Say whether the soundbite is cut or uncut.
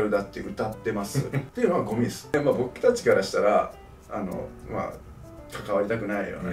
cut